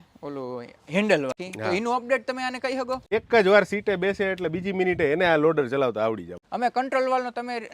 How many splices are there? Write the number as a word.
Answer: three